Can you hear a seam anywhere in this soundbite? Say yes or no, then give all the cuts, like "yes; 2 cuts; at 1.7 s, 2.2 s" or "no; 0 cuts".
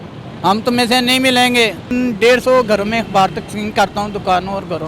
yes; 1 cut; at 1.9 s